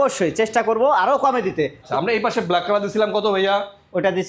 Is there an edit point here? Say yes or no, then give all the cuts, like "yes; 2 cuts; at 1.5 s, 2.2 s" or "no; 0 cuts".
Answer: yes; 1 cut; at 1.9 s